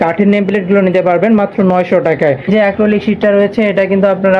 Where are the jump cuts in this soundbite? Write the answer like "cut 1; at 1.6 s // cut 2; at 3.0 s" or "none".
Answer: cut 1; at 2.5 s